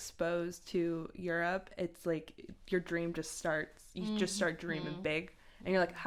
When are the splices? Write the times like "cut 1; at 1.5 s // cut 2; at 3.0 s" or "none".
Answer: none